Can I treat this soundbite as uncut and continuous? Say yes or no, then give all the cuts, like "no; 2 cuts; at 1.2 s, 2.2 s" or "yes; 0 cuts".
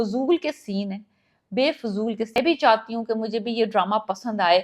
no; 1 cut; at 2.4 s